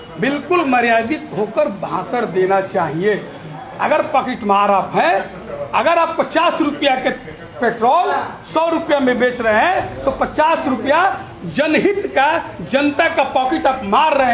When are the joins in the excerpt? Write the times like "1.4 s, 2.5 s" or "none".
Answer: none